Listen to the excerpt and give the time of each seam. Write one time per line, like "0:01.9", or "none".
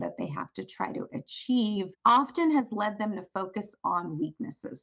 0:01.9